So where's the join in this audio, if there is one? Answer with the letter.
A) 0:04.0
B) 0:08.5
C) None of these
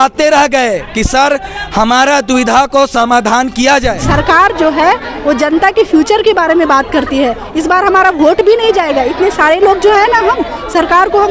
A